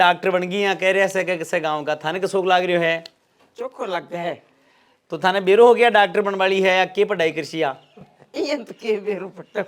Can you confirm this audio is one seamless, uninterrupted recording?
yes; 0 cuts

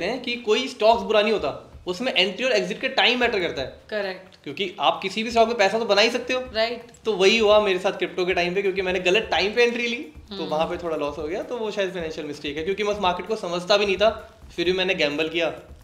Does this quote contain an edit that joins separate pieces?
no; 0 cuts

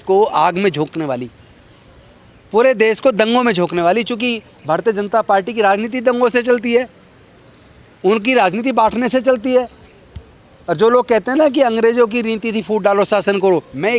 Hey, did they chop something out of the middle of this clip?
no; 0 cuts

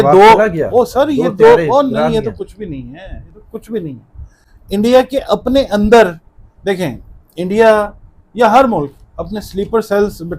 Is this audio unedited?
yes; 0 cuts

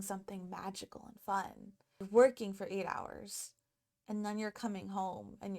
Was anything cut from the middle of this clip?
yes; 1 cut; at 2.0 s

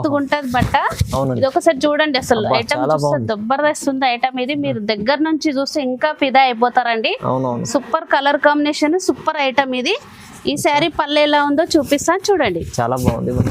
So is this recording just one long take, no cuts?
yes; 0 cuts

